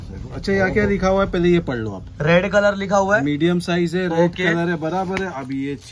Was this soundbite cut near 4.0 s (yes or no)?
no